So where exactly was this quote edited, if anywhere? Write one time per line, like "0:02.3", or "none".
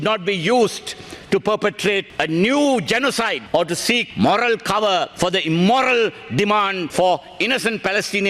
0:02.1
0:03.8
0:05.1
0:06.8